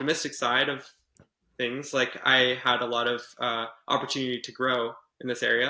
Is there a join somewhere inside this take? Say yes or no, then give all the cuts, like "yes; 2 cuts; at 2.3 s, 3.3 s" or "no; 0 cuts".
no; 0 cuts